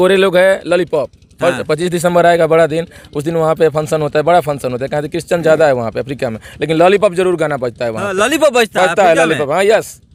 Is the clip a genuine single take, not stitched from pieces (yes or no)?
yes